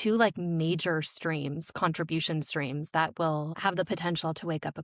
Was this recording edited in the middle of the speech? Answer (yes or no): yes